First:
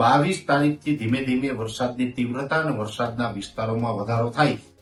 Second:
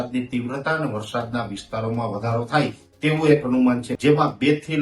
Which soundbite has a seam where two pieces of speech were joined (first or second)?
second